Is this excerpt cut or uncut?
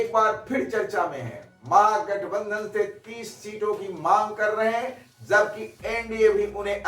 uncut